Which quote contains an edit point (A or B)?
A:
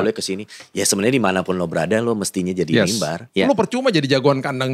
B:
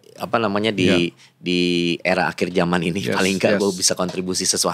A